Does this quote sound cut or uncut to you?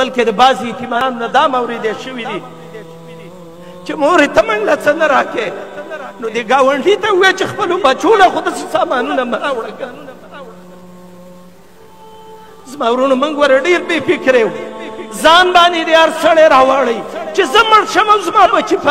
cut